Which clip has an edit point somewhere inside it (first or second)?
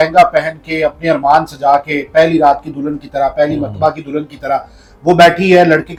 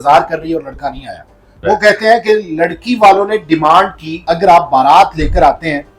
second